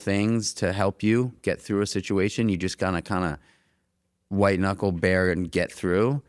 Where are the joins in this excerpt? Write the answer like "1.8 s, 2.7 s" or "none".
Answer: none